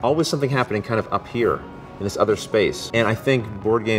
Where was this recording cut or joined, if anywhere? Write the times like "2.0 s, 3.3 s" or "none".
2.8 s

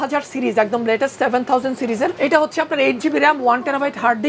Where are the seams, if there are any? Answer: 2.1 s

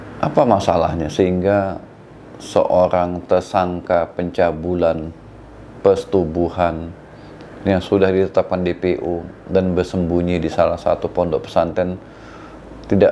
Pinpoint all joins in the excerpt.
none

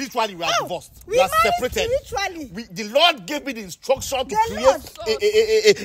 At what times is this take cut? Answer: none

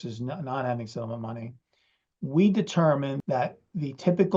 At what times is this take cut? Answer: 3.2 s

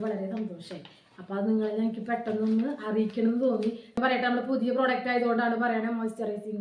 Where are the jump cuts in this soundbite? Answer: 4.0 s

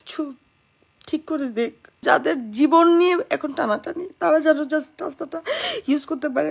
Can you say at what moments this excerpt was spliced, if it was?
2.0 s

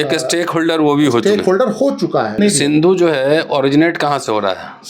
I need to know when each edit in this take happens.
2.4 s

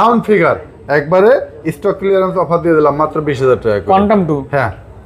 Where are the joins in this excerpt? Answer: none

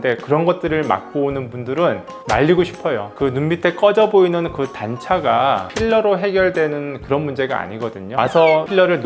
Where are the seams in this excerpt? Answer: 8.1 s

